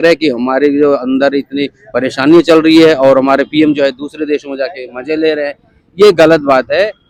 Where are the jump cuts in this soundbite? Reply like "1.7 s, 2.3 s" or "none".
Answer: none